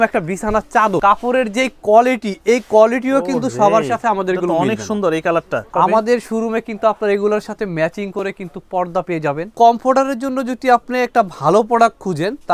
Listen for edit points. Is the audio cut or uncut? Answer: cut